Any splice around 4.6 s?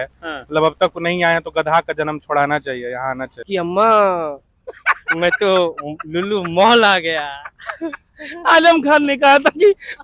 no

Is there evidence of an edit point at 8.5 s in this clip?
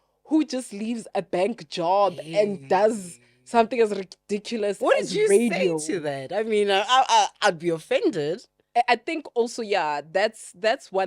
yes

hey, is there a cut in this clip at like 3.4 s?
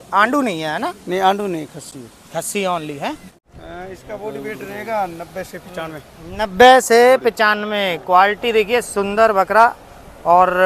yes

